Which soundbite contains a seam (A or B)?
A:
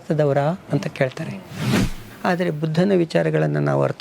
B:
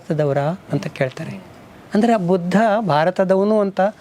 A